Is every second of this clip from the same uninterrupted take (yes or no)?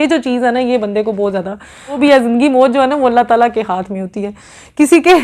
no